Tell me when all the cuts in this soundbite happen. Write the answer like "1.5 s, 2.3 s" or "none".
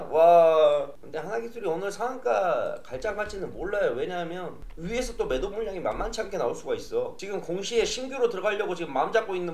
7.2 s